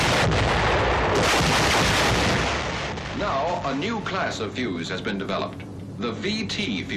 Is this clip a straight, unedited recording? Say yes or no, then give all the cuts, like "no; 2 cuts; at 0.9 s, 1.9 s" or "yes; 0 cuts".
no; 1 cut; at 5.1 s